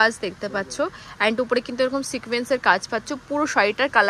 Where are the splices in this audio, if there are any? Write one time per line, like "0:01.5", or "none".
none